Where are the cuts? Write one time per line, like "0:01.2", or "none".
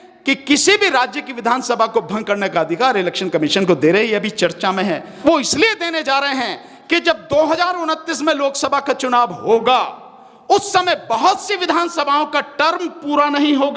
0:05.1